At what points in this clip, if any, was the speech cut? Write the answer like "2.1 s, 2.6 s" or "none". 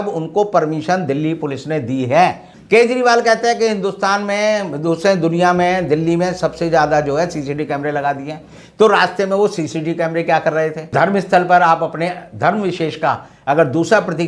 2.5 s, 10.9 s